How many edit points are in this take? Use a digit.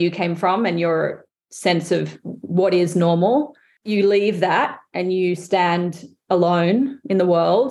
1